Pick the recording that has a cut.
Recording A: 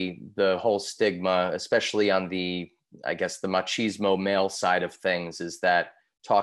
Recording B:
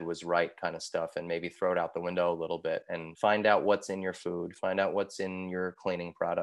B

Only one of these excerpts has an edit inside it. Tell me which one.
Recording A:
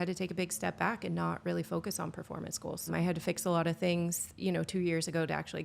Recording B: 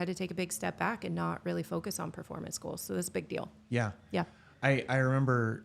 A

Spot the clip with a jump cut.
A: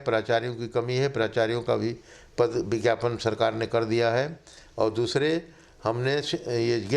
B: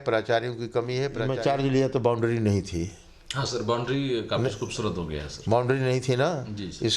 B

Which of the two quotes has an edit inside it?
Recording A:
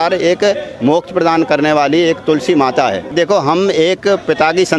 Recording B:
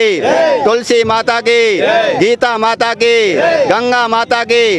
A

